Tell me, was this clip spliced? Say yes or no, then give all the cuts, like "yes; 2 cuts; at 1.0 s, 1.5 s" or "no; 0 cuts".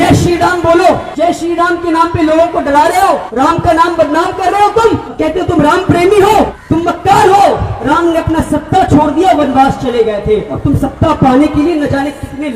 yes; 6 cuts; at 1.1 s, 3.3 s, 5.1 s, 6.6 s, 7.7 s, 10.5 s